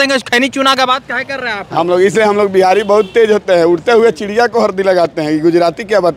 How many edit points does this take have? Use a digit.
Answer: 0